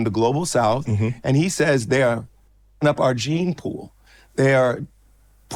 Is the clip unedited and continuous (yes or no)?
yes